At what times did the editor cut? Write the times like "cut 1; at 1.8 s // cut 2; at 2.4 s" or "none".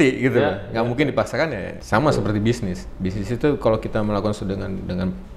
none